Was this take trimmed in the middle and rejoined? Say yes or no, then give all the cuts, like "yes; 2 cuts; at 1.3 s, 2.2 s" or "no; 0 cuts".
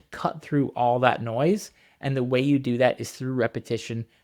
no; 0 cuts